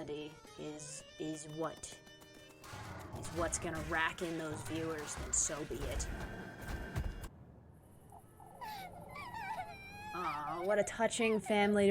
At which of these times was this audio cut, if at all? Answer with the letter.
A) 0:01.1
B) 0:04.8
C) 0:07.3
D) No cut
C